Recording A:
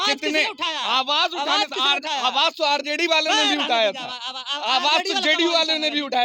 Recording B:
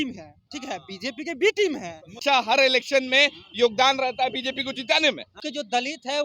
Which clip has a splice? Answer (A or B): B